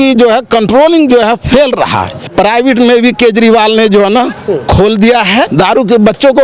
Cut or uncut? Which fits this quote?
cut